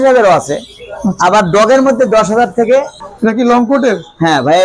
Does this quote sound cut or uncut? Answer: cut